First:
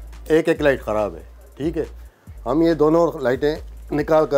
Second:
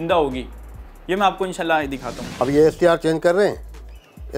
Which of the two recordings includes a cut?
second; 1 cut; at 2.2 s

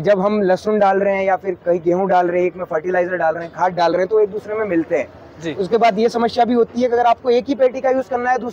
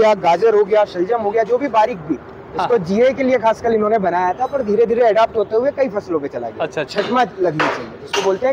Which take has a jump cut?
second; 1 cut; at 6.9 s

